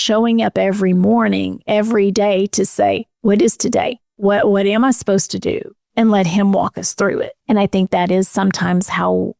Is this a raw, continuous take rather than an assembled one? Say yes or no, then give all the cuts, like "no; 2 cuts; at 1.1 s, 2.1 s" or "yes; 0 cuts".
no; 3 cuts; at 4.0 s, 5.8 s, 7.4 s